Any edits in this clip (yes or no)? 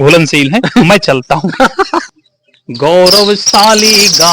yes